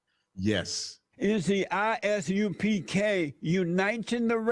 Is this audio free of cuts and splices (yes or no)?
yes